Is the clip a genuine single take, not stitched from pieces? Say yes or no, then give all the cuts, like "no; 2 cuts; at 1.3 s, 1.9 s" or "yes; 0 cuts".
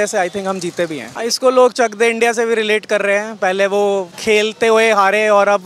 no; 2 cuts; at 1.1 s, 4.1 s